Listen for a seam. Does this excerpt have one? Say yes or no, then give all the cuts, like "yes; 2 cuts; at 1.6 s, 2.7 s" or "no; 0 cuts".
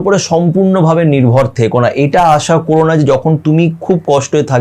no; 0 cuts